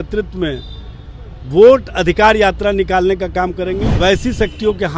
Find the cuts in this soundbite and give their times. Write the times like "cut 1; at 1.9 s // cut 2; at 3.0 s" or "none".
cut 1; at 3.9 s